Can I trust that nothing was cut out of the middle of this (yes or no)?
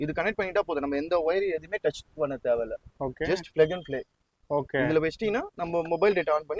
yes